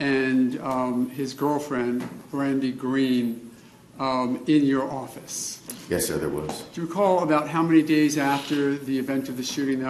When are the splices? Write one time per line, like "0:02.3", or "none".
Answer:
0:02.9

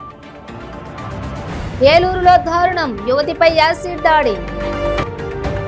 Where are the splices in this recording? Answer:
none

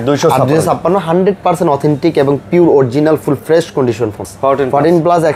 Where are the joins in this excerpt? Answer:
0:04.3

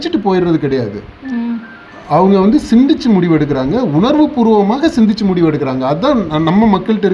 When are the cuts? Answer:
none

